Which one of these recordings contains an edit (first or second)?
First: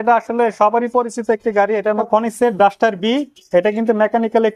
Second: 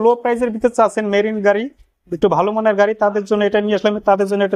first